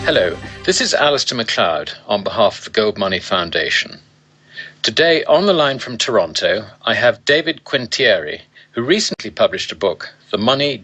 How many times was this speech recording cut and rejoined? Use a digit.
1